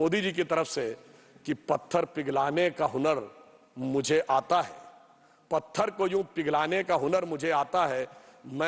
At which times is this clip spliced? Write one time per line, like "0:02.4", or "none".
none

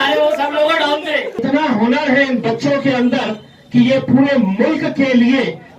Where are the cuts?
0:01.4

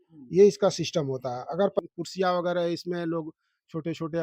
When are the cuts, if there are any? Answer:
0:01.8

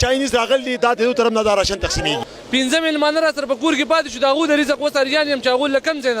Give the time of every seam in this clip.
0:02.3

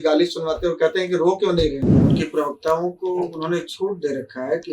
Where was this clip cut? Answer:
0:02.0

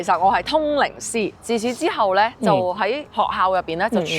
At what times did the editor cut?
0:01.4
0:02.7

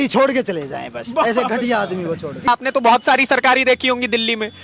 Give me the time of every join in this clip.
0:02.5

